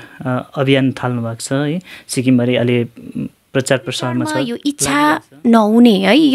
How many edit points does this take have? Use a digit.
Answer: 1